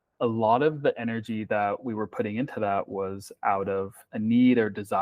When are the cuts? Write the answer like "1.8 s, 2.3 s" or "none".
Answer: 4.0 s